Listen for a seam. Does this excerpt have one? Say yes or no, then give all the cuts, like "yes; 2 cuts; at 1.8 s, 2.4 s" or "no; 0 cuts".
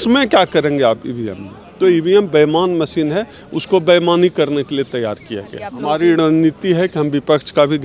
yes; 1 cut; at 5.7 s